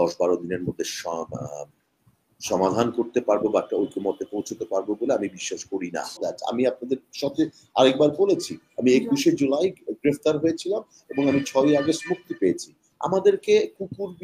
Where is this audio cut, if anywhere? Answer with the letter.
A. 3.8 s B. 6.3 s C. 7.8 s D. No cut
B